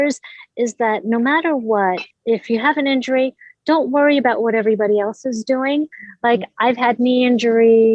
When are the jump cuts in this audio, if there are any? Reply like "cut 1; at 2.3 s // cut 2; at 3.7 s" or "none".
cut 1; at 2.1 s